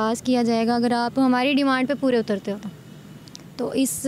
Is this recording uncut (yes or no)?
yes